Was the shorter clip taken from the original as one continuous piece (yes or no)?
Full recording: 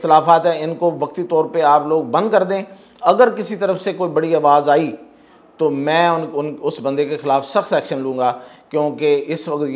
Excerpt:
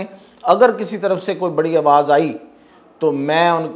yes